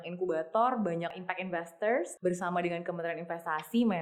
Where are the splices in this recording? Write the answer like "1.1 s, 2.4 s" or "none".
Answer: 1.2 s, 2.1 s